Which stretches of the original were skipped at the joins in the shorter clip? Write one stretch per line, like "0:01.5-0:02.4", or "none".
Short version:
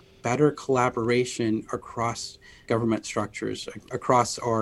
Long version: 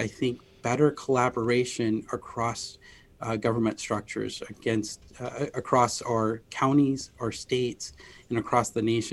0:03.0-0:03.4
0:04.6-0:05.5